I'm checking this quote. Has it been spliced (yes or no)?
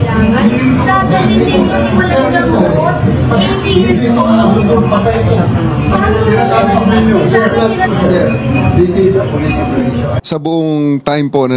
yes